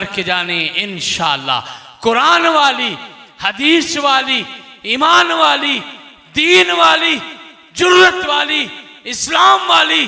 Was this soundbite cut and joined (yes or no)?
no